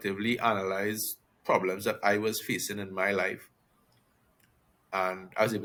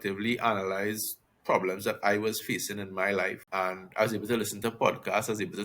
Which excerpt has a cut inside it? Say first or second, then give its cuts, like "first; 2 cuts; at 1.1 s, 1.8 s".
second; 1 cut; at 3.4 s